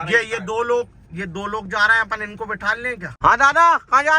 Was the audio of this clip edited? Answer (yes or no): yes